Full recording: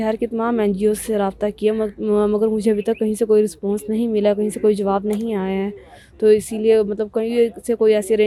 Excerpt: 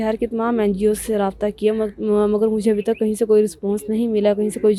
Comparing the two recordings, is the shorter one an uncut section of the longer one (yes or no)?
yes